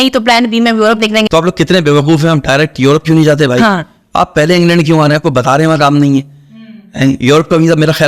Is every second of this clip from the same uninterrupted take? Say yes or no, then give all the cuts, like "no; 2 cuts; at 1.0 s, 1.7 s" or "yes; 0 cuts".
yes; 0 cuts